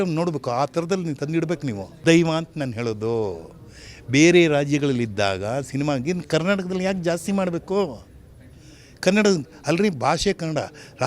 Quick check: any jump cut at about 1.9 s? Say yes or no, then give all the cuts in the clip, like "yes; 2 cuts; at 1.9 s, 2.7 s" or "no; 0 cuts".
yes; 1 cut; at 1.9 s